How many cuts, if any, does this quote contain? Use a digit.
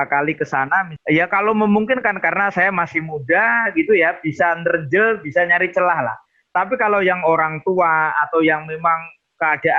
1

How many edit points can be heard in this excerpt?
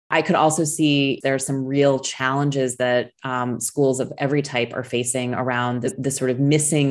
2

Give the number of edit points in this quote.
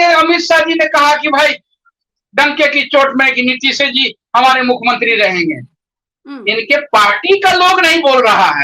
0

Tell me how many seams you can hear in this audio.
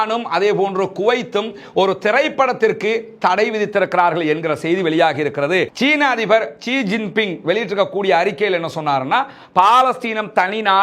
1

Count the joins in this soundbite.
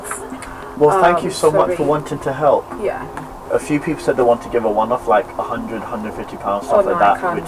1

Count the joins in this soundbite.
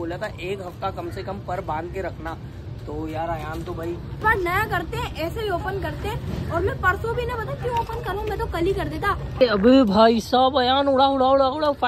0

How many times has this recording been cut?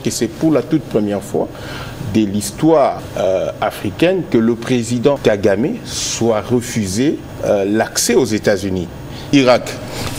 4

